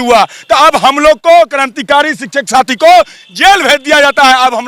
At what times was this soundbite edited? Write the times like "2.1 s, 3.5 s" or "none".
none

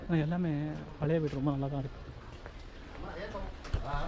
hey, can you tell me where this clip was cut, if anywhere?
none

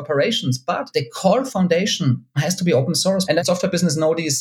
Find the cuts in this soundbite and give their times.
none

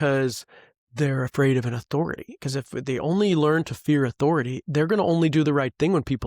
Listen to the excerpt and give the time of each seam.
none

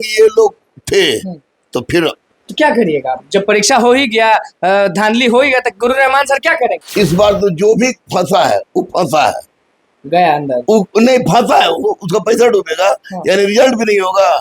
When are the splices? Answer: 6.8 s

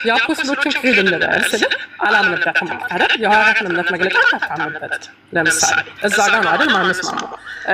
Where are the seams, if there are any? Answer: none

